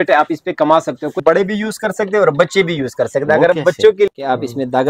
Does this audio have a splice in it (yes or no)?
yes